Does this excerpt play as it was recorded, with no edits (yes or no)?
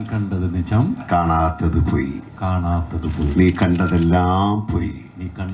yes